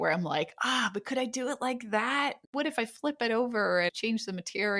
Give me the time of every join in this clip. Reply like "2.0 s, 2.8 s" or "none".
2.5 s, 3.9 s